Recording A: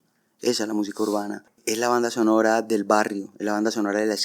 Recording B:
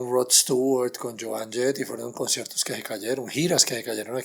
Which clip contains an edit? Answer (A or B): A